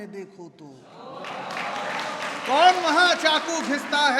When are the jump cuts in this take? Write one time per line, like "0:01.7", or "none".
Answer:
none